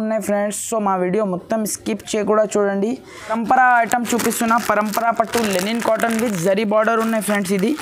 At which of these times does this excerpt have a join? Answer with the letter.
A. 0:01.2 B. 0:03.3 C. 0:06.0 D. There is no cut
B